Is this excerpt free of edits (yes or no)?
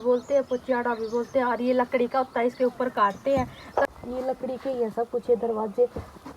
no